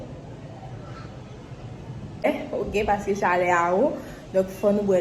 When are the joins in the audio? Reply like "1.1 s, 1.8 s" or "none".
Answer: 2.3 s